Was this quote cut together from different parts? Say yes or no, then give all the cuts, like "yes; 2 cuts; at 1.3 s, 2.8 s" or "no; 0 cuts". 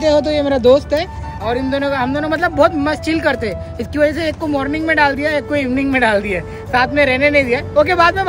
no; 0 cuts